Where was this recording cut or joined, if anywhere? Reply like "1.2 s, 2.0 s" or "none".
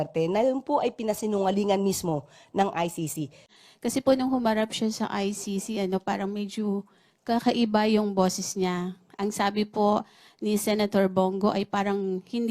3.5 s